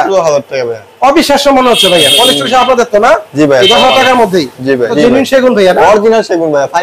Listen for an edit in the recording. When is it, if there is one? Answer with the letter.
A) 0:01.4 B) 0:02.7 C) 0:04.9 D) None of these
C